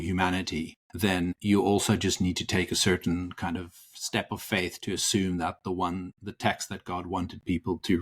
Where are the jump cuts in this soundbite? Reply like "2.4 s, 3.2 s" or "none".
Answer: 1.3 s